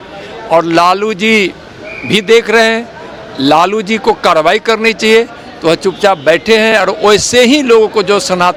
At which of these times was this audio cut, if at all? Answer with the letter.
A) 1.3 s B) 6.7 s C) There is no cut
C